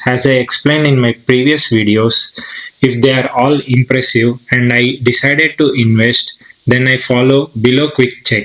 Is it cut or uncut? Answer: uncut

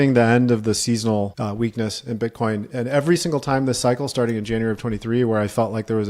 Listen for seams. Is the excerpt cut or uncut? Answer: cut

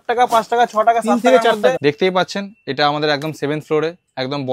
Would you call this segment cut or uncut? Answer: cut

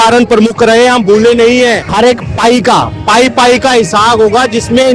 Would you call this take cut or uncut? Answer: cut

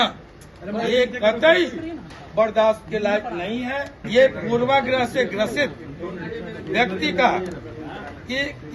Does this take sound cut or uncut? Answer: cut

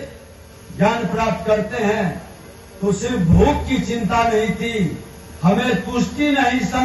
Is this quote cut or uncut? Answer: uncut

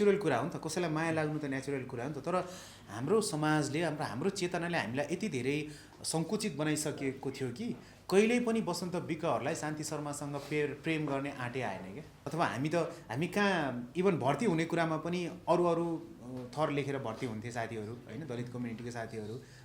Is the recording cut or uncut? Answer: cut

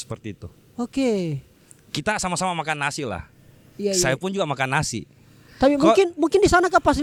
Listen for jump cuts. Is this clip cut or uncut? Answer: uncut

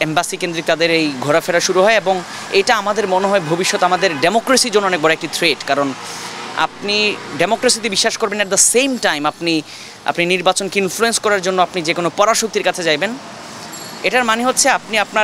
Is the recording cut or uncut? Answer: uncut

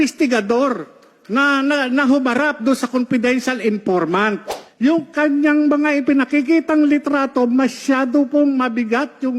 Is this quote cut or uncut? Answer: cut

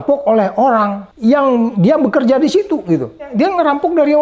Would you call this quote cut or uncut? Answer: cut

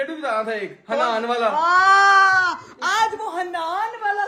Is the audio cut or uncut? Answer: uncut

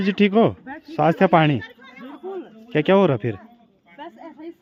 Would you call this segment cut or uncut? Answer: uncut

